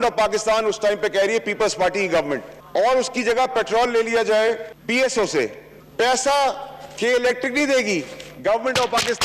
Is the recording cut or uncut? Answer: uncut